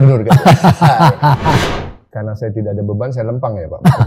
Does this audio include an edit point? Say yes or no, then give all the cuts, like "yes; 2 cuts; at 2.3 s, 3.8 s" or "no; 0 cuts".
yes; 1 cut; at 1.6 s